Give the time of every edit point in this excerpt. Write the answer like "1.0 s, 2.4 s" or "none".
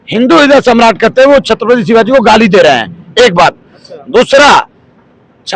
none